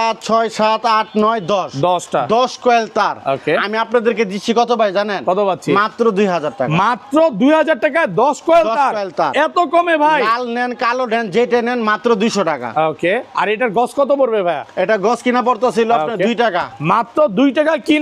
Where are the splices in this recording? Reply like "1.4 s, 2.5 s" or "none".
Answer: none